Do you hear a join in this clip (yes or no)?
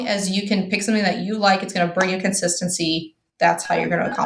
no